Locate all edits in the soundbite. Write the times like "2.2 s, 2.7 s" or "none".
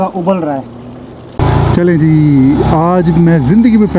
1.4 s